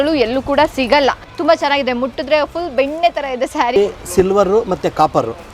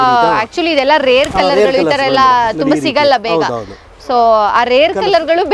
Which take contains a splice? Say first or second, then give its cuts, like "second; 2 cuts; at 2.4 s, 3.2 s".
first; 2 cuts; at 1.3 s, 3.8 s